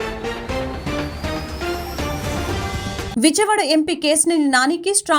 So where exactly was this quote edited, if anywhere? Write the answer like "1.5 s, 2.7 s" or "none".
3.0 s